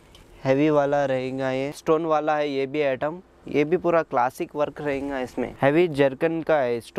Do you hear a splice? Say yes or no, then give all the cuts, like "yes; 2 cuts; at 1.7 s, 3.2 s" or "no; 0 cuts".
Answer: yes; 2 cuts; at 1.7 s, 5.5 s